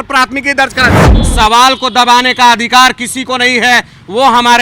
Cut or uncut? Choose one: cut